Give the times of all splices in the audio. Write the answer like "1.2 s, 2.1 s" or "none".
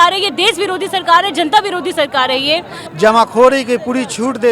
2.8 s